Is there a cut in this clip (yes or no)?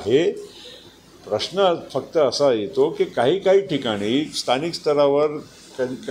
no